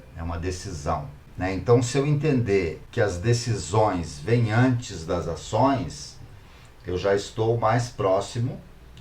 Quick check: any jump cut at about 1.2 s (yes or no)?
yes